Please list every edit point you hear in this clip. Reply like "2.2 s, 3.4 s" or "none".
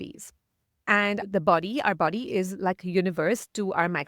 1.2 s